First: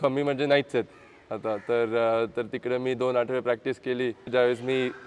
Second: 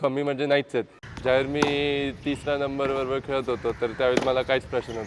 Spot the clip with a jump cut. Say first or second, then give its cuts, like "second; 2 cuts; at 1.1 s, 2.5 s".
second; 1 cut; at 1.0 s